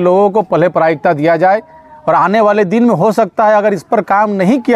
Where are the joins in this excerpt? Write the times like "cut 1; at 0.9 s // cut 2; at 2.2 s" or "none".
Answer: none